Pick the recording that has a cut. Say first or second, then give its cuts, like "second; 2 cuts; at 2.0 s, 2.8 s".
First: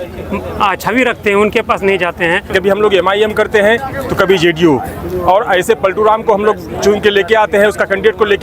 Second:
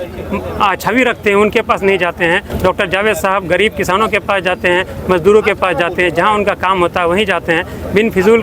first; 1 cut; at 2.5 s